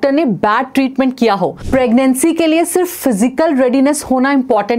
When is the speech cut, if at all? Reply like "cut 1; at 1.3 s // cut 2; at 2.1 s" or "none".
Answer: cut 1; at 1.6 s